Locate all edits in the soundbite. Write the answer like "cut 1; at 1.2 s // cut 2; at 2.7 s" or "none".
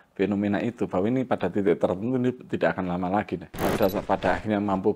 cut 1; at 3.5 s